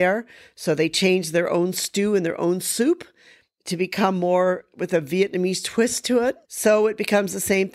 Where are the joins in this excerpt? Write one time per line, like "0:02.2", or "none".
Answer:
0:06.5